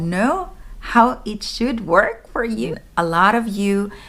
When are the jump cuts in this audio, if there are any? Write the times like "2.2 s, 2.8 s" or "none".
2.7 s